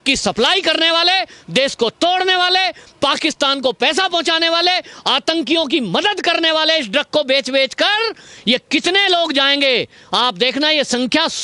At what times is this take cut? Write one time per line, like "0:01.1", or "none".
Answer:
none